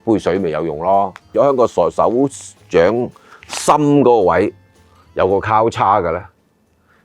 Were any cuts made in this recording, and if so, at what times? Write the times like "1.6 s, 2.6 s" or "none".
1.2 s